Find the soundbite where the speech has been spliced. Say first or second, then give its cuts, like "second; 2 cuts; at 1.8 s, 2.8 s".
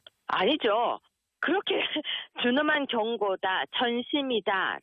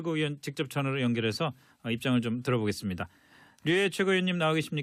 first; 1 cut; at 1.4 s